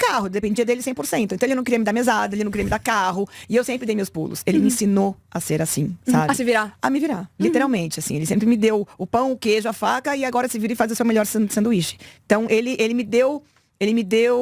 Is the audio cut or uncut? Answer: uncut